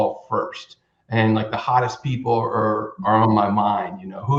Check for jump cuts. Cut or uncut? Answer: uncut